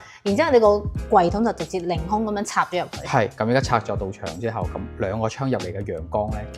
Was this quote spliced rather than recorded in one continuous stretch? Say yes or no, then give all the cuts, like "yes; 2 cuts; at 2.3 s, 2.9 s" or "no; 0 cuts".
yes; 1 cut; at 3.3 s